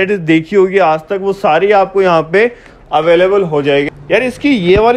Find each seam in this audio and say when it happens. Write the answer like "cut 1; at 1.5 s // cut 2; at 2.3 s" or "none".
cut 1; at 3.9 s